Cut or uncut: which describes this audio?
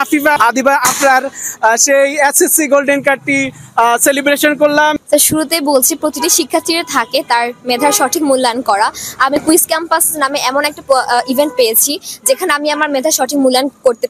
cut